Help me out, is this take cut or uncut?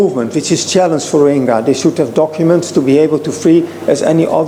uncut